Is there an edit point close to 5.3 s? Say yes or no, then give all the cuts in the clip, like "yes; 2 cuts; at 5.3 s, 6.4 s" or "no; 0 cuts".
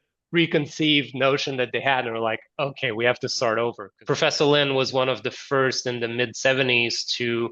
no; 1 cut; at 3.9 s